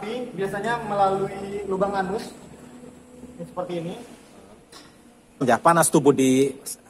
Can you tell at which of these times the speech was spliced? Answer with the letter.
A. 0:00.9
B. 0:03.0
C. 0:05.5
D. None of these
C